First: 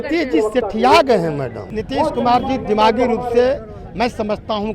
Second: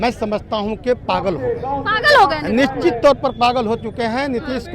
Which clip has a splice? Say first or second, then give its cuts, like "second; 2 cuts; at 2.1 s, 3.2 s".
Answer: first; 1 cut; at 1.7 s